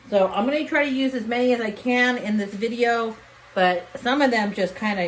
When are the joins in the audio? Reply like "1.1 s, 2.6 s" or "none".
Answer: none